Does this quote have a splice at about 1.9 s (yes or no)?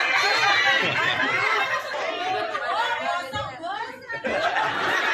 yes